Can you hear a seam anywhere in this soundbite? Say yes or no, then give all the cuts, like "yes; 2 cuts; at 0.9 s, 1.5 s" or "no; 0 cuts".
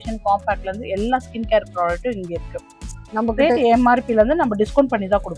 yes; 1 cut; at 2.8 s